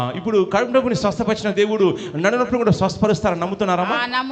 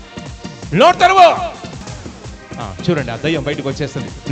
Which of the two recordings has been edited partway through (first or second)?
second